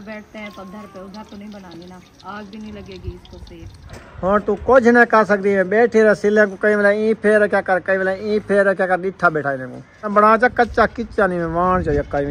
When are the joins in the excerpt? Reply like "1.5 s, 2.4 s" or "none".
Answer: 3.9 s, 10.1 s

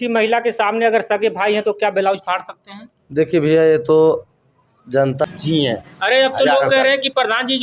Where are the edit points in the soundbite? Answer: 5.2 s

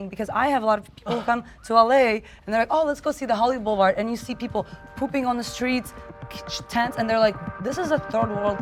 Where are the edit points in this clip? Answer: none

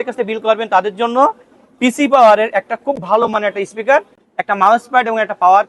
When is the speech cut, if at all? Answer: none

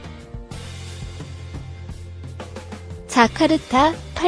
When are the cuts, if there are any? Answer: 3.1 s

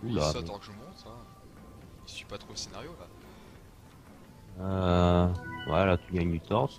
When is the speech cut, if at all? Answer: 4.6 s

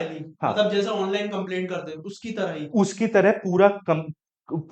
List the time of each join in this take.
none

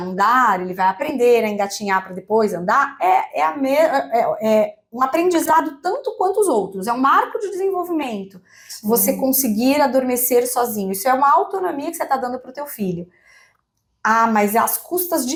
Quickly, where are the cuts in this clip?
none

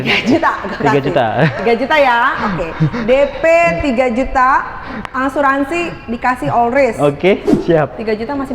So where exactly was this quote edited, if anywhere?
7.5 s

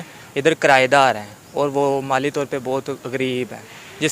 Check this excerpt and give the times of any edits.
none

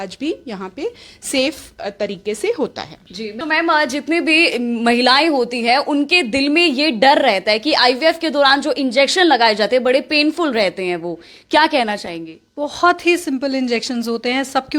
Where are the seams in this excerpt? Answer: 3.4 s

